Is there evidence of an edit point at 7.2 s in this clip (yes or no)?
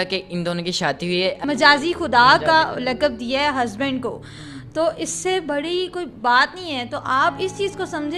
no